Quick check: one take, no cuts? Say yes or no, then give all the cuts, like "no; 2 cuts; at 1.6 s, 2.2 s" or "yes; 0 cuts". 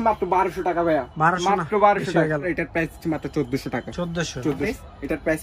yes; 0 cuts